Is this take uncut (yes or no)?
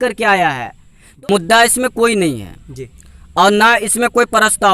no